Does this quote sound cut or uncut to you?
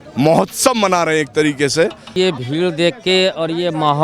cut